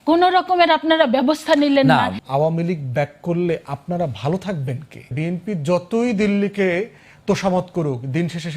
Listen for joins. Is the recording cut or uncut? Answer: cut